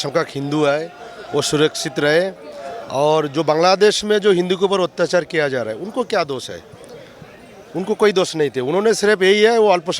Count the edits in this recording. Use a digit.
0